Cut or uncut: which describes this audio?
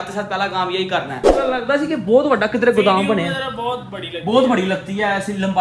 cut